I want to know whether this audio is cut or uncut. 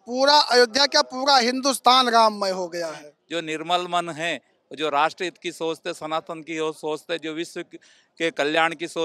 cut